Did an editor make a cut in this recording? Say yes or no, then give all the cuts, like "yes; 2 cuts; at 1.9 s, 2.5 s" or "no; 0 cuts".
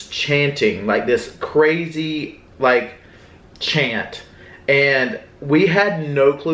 no; 0 cuts